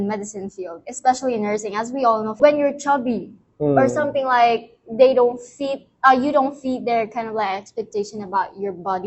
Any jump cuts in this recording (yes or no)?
no